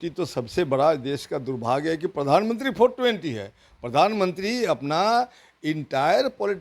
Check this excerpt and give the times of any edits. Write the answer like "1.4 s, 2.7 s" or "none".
none